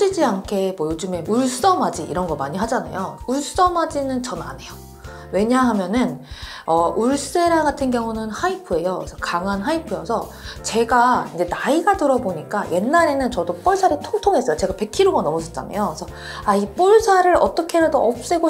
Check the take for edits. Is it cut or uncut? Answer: uncut